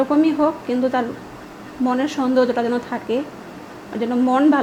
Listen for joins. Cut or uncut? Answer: uncut